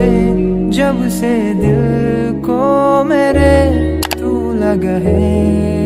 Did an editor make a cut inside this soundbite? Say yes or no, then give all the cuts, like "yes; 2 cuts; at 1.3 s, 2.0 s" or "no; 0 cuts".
no; 0 cuts